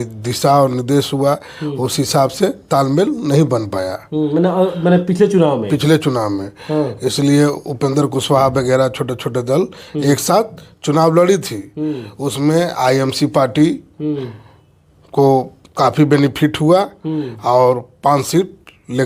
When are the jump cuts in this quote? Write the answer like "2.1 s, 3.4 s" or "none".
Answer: none